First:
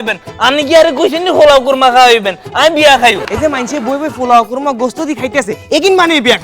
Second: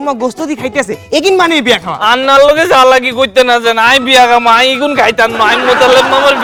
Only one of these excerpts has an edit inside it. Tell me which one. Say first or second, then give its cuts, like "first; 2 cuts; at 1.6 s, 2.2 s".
first; 1 cut; at 3.2 s